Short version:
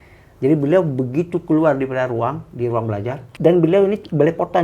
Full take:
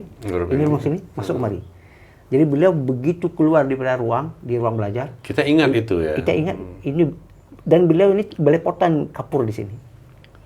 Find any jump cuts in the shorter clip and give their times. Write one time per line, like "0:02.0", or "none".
0:03.2